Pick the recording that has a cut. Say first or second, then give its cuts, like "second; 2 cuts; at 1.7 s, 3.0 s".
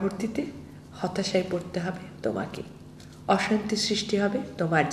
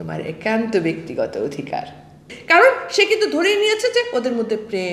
second; 1 cut; at 2.3 s